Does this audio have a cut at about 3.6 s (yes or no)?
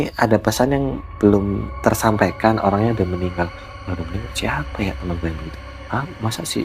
no